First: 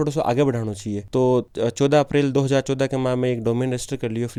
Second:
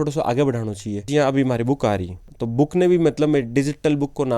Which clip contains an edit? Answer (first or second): second